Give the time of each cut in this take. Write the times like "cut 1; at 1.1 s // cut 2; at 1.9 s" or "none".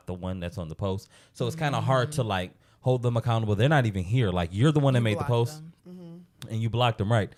none